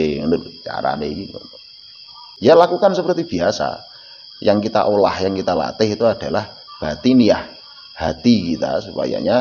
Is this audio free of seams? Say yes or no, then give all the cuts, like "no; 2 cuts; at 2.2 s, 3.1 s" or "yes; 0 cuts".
no; 1 cut; at 2.2 s